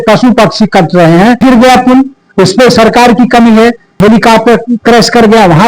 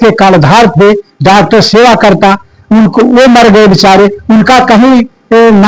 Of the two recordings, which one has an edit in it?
first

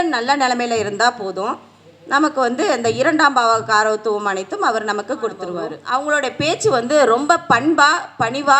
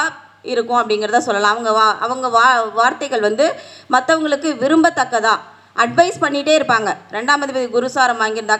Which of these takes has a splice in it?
first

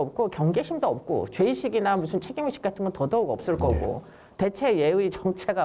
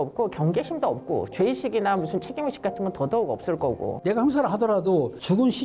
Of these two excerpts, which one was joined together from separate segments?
second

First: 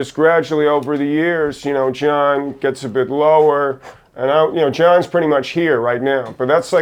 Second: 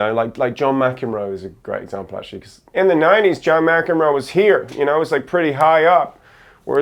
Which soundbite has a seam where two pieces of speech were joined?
second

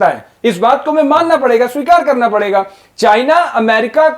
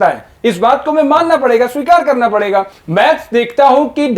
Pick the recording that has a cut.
second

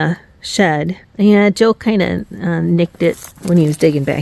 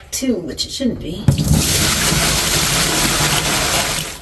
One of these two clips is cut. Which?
first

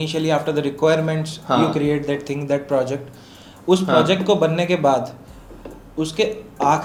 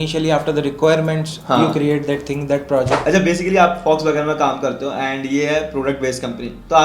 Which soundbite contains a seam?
second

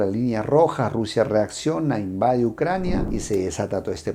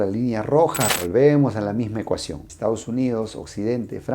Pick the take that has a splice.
second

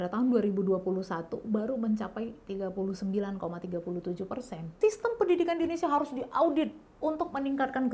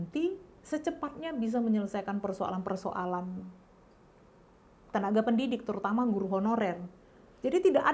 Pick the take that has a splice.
first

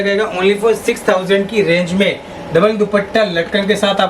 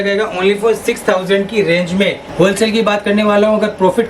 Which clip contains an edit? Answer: second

